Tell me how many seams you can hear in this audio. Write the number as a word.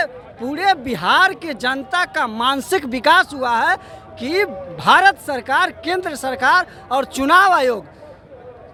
zero